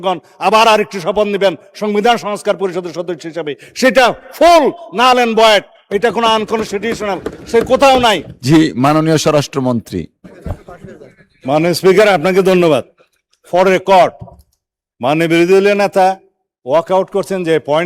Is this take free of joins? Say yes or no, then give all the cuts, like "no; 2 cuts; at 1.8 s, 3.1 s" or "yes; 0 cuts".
no; 1 cut; at 8.3 s